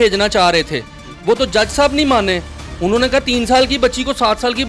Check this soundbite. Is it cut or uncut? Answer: uncut